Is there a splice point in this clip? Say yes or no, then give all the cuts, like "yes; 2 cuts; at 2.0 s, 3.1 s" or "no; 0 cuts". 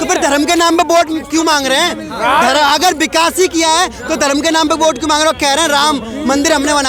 no; 0 cuts